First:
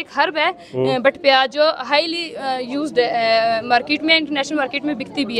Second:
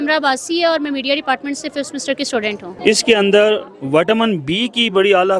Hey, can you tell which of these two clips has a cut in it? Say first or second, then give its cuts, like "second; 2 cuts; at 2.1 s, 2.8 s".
second; 1 cut; at 2.7 s